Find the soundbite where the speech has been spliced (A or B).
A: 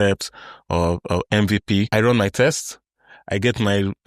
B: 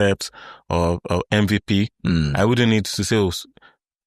A